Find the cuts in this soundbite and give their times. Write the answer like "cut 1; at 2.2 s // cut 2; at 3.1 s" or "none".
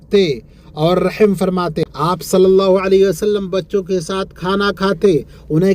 cut 1; at 1.8 s